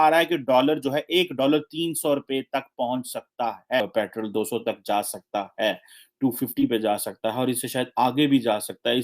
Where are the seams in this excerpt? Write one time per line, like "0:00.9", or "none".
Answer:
0:03.8